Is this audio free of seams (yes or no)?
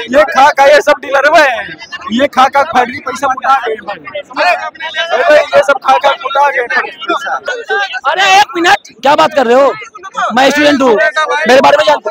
no